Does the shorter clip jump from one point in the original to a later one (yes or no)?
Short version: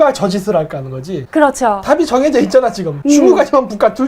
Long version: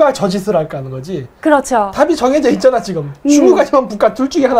yes